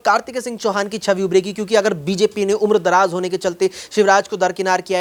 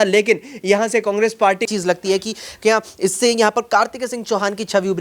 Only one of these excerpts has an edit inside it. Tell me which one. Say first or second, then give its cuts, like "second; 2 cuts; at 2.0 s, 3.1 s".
second; 1 cut; at 1.7 s